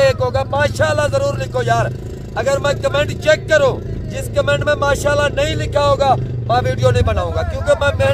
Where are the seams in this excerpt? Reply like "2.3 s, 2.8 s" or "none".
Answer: none